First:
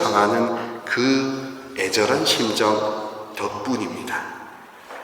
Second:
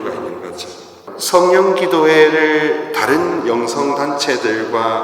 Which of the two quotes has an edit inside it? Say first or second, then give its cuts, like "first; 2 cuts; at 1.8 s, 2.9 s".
second; 1 cut; at 1.0 s